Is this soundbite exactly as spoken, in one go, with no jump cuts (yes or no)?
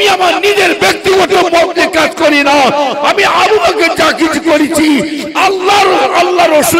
yes